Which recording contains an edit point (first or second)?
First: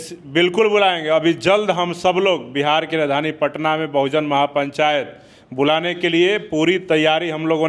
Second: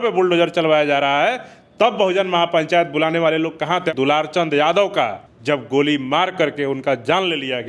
second